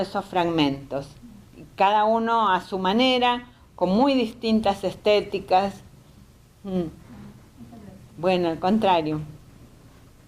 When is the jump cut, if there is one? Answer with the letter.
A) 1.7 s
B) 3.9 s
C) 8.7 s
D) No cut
B